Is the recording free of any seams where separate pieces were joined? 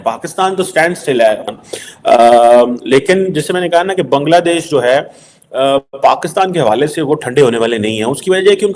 no; 1 cut; at 1.5 s

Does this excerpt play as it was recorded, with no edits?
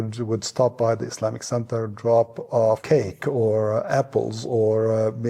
yes; 0 cuts

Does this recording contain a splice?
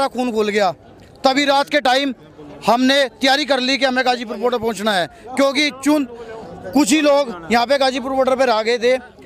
no; 0 cuts

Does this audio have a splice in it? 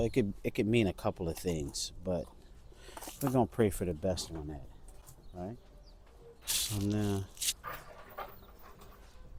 no; 0 cuts

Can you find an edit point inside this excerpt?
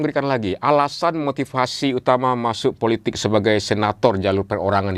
no; 0 cuts

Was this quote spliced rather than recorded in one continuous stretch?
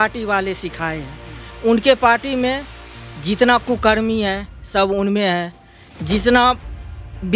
no; 0 cuts

